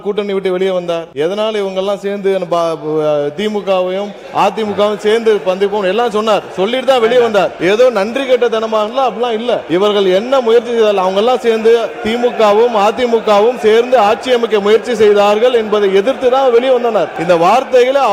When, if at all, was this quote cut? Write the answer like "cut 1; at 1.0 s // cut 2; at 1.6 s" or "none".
cut 1; at 1.1 s // cut 2; at 7.5 s // cut 3; at 9.6 s // cut 4; at 17.1 s